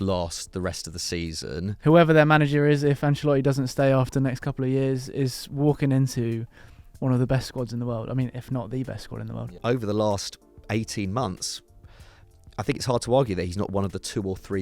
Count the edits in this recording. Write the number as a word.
two